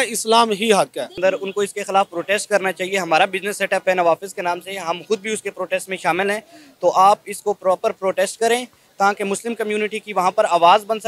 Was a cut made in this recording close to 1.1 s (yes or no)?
yes